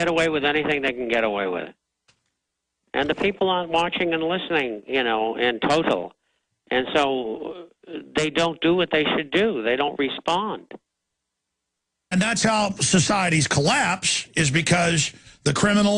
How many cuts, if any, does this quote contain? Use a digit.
0